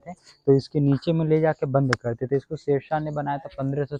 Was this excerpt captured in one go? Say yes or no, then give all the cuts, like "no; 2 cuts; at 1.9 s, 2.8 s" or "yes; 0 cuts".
yes; 0 cuts